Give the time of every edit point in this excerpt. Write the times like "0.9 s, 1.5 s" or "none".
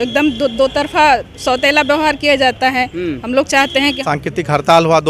4.0 s

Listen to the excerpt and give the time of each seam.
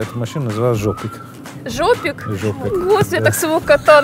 none

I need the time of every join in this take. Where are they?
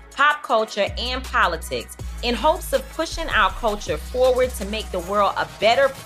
none

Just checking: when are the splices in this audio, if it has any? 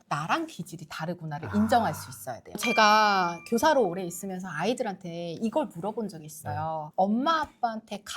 2.4 s

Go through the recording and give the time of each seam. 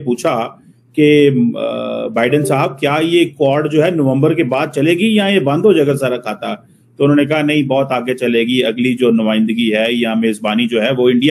none

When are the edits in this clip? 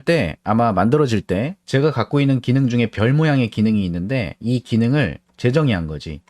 1.6 s

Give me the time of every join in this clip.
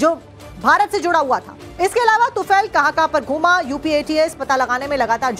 2.7 s

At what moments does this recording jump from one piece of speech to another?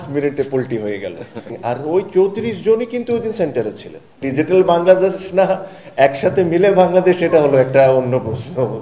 1.5 s, 4.2 s

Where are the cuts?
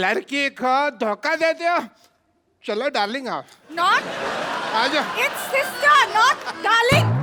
none

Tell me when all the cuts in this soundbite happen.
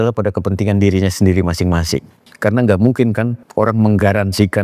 2.2 s, 3.4 s

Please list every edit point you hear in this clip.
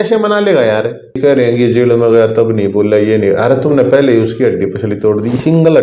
1.2 s

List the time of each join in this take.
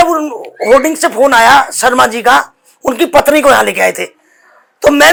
none

